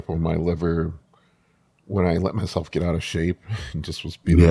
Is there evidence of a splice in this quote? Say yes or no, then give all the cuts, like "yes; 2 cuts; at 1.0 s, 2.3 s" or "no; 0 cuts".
no; 0 cuts